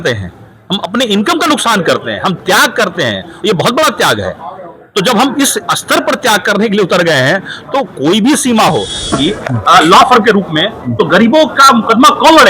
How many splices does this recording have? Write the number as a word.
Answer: one